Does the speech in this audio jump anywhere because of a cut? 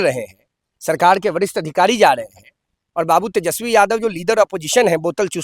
no; 0 cuts

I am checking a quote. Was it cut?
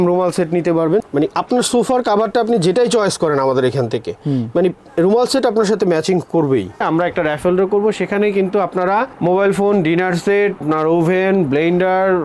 yes; 2 cuts; at 1.0 s, 6.8 s

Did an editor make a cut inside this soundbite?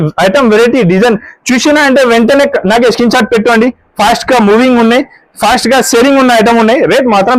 no; 0 cuts

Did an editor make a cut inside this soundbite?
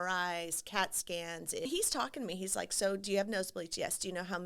yes; 1 cut; at 1.7 s

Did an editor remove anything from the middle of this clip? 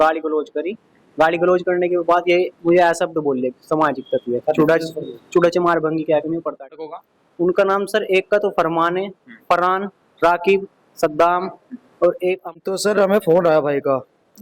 yes; 2 cuts; at 6.8 s, 12.6 s

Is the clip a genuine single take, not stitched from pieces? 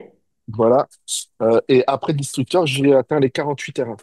yes; 0 cuts

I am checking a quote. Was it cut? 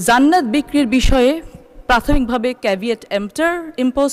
no; 0 cuts

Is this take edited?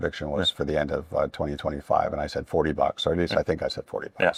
no; 0 cuts

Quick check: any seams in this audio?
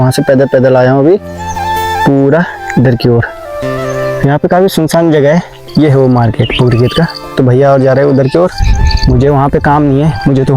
yes; 1 cut; at 5.6 s

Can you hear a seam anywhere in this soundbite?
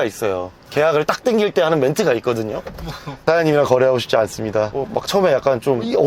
yes; 1 cut; at 3.2 s

